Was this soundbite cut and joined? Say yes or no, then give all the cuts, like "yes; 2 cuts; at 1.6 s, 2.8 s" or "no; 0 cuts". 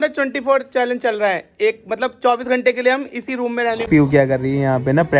yes; 1 cut; at 3.9 s